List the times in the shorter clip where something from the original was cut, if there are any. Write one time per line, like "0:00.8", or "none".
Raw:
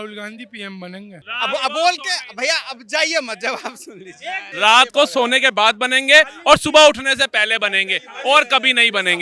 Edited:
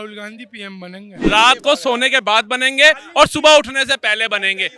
0:01.2

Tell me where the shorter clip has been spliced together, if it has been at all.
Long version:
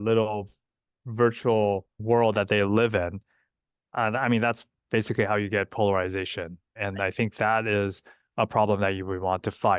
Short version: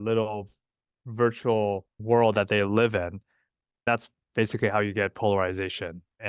0:03.9

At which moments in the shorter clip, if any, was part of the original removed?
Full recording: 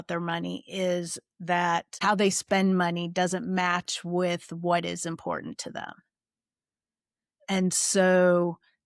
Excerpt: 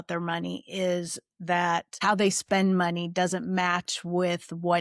none

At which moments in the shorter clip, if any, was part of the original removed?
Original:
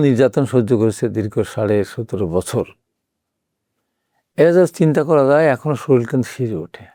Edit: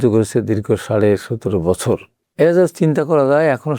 0:02.2

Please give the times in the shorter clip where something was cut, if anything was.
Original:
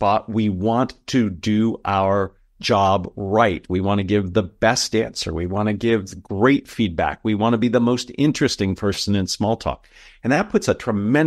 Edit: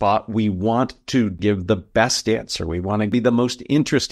0:01.4
0:03.1

